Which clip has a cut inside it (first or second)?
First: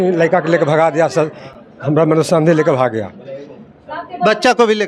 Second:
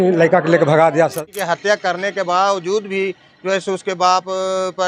second